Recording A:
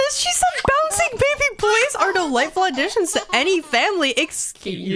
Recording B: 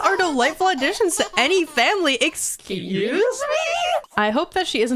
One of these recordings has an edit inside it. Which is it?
B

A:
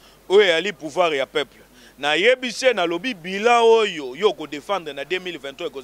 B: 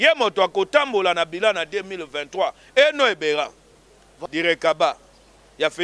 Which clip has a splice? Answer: B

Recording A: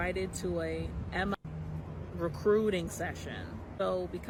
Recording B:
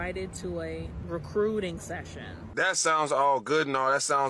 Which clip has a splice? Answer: B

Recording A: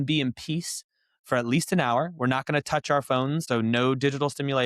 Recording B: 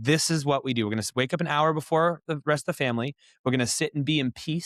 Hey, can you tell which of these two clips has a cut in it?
A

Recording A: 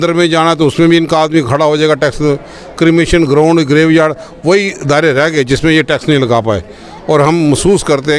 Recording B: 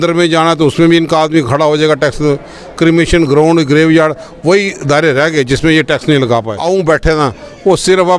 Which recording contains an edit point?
B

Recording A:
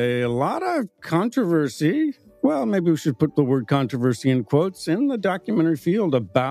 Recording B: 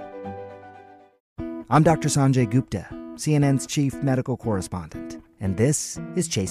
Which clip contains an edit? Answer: B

